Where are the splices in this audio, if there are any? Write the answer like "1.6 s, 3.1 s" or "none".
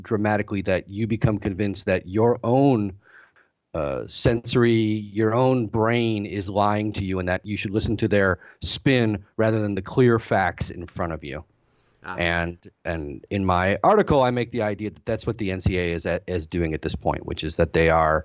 none